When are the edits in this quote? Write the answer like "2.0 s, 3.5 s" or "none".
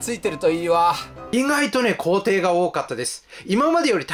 1.1 s